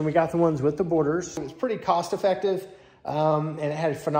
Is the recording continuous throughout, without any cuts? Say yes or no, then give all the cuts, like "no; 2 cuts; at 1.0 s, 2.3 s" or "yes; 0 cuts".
no; 1 cut; at 1.4 s